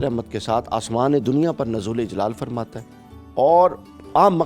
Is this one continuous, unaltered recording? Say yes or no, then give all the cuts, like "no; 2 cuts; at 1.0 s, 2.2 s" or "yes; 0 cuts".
yes; 0 cuts